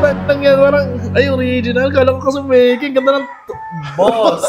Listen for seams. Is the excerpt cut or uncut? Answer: uncut